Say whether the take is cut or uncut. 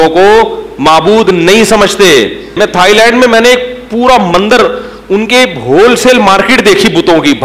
cut